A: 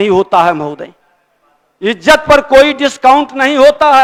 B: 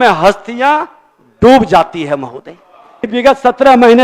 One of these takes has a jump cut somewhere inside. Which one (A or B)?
B